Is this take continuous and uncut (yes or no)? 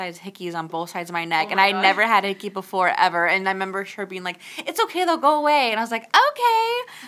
yes